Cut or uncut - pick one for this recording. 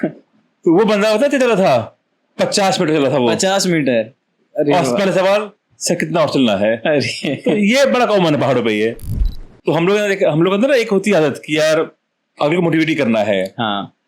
cut